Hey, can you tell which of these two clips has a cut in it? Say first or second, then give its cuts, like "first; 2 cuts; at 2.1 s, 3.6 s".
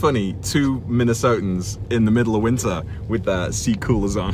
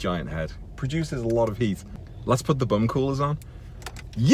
second; 1 cut; at 1.9 s